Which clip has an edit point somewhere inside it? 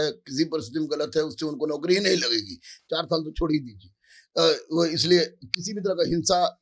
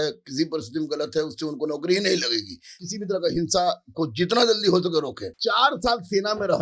second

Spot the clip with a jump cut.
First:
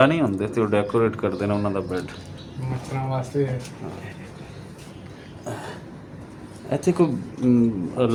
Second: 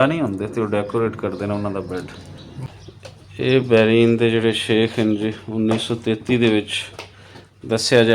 second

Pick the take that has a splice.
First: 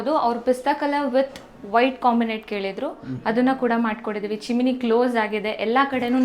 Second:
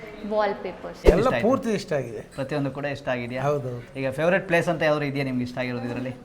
second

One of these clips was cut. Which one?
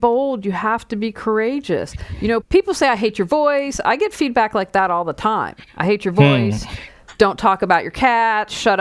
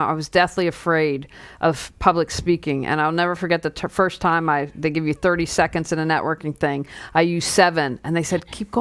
first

